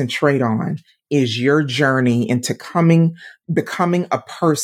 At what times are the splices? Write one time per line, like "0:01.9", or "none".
none